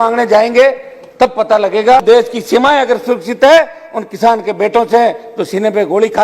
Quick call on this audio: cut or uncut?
cut